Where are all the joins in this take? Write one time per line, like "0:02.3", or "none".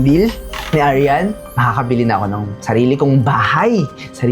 0:01.4